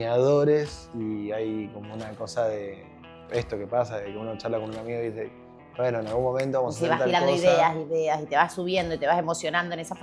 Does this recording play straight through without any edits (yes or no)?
yes